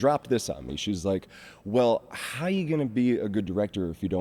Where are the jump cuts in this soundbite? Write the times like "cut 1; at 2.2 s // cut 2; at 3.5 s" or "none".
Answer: none